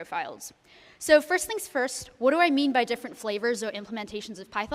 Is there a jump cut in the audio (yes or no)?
yes